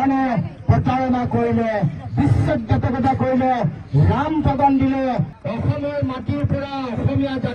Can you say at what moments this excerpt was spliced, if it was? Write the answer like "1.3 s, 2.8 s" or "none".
5.3 s